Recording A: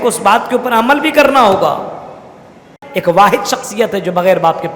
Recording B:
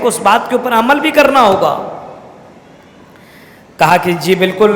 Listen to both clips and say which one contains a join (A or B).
A